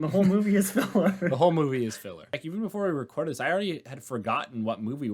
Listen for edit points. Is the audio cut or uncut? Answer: cut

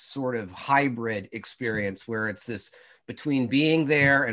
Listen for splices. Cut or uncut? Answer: uncut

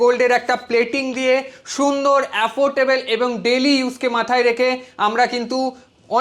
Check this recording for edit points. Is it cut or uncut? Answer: uncut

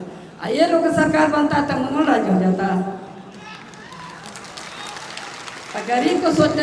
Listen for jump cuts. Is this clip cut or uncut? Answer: uncut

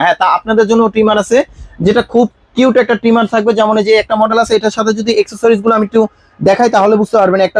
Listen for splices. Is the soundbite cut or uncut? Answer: uncut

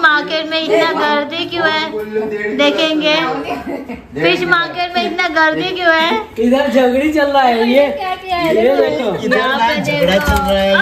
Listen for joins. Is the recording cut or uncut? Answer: uncut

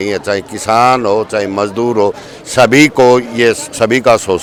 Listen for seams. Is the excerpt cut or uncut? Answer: uncut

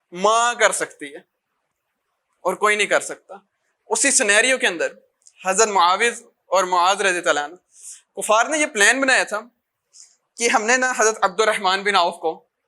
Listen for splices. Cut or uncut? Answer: uncut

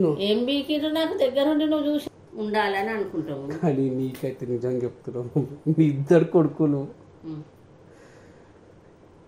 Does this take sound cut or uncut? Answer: cut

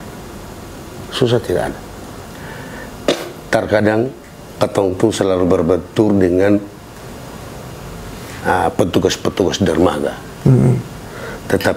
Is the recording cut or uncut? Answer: cut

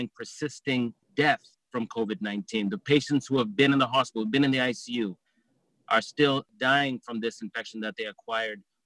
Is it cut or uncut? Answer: cut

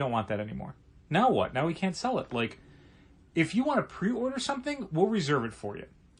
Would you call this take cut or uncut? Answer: uncut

